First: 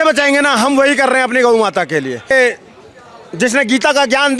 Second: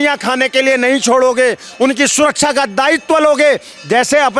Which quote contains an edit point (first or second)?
first